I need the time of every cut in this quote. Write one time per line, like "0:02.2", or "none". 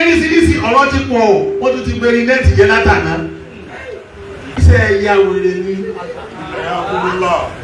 0:04.6